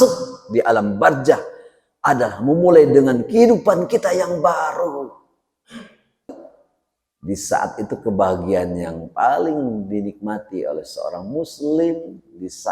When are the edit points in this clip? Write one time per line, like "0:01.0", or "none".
0:06.3